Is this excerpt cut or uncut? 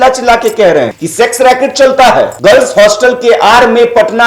cut